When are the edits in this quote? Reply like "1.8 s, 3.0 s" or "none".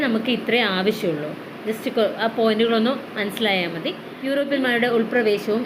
4.2 s